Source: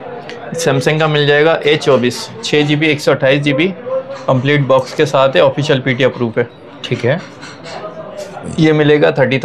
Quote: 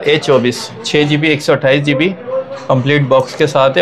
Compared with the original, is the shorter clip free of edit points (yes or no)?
yes